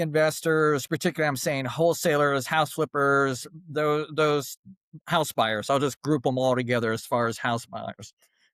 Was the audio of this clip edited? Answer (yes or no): no